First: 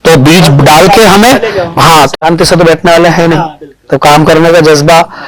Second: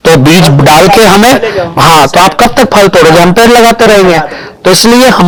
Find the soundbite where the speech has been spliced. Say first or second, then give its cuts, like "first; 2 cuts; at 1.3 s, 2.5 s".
first; 1 cut; at 2.1 s